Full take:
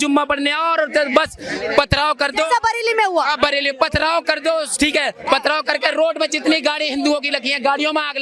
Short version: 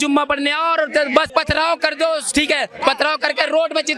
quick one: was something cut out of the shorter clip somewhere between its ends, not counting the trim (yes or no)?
yes